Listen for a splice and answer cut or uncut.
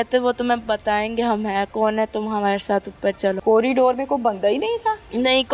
cut